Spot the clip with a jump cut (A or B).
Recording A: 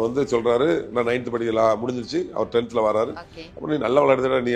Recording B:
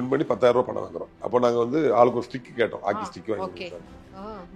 B